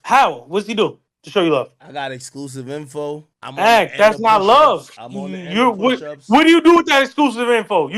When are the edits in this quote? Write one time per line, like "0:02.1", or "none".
none